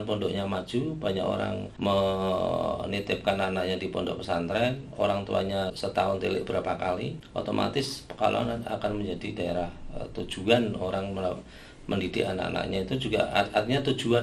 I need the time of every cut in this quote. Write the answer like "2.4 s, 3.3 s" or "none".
1.7 s, 5.8 s, 7.2 s